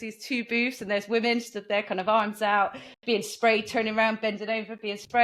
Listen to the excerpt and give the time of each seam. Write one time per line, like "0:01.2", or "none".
none